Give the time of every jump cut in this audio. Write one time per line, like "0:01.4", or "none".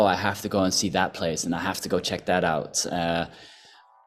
none